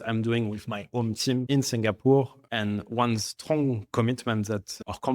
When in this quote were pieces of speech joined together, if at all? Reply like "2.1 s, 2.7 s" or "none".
2.4 s